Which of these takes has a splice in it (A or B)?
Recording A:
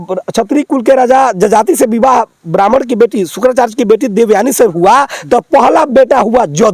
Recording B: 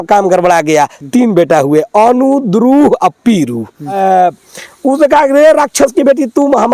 B